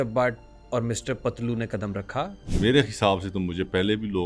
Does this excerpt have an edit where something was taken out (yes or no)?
yes